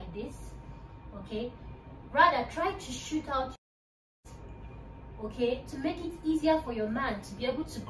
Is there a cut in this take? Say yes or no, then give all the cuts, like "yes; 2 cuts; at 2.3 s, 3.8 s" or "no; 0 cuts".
no; 0 cuts